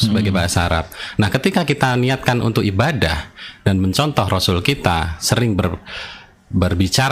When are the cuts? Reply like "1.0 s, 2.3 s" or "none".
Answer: none